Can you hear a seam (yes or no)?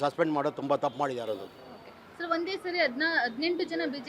no